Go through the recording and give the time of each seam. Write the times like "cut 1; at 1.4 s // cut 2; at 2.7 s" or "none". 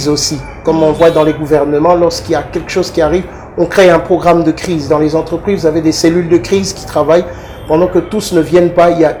none